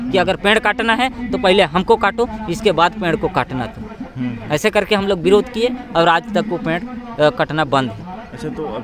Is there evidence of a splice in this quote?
no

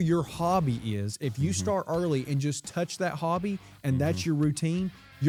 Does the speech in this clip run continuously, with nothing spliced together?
yes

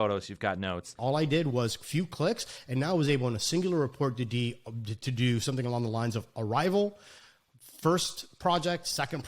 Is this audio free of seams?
no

